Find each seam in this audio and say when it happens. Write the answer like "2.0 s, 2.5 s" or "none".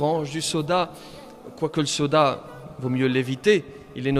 none